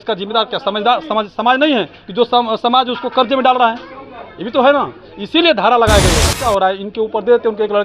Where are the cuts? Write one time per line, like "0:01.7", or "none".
0:06.3